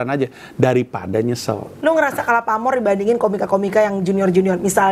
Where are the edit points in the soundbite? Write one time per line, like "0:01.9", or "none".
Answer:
0:01.7